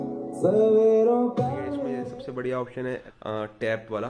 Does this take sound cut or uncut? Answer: cut